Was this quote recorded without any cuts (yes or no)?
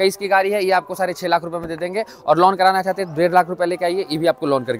yes